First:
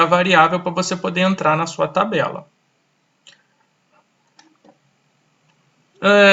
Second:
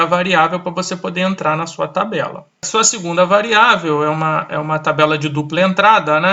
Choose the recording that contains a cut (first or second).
second